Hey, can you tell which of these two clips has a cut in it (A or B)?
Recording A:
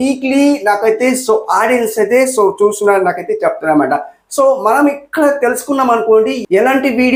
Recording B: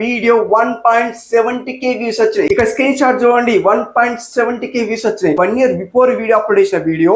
B